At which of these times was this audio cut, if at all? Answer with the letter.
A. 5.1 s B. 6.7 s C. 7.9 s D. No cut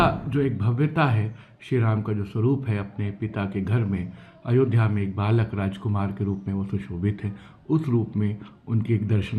D